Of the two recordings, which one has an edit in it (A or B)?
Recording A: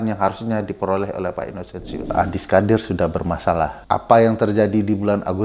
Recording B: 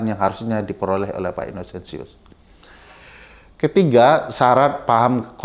A